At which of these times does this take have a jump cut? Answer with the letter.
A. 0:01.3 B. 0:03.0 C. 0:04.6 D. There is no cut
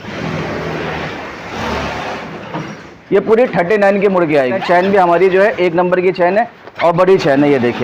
C